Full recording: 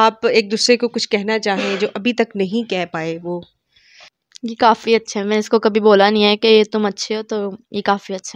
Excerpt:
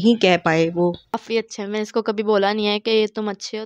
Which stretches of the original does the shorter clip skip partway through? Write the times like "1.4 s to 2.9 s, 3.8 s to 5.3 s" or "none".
3.7 s to 4.8 s